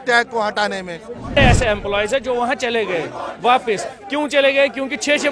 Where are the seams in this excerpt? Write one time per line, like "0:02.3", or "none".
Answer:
0:01.4